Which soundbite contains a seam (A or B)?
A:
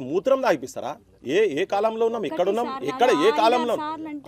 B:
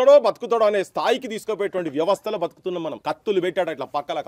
B